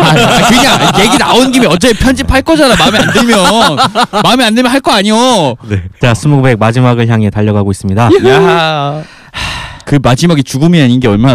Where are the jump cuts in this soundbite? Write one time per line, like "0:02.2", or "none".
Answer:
none